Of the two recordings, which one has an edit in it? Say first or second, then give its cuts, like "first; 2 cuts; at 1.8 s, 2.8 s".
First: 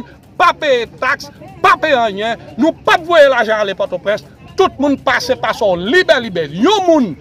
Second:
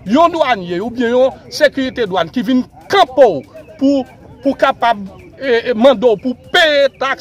first; 1 cut; at 4.4 s